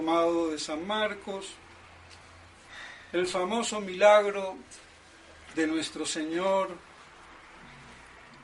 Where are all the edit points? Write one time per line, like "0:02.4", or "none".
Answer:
0:01.2